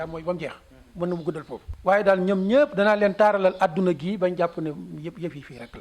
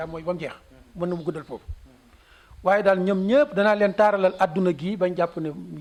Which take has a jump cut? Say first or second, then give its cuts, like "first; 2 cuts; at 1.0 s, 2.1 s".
first; 1 cut; at 1.6 s